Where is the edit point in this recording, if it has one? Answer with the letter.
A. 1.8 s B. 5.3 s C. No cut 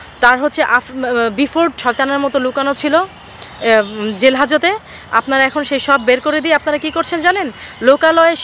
A